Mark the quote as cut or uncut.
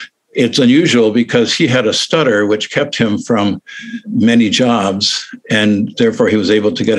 cut